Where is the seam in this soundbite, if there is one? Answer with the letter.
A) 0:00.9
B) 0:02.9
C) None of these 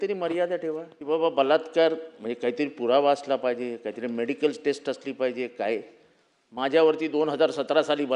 A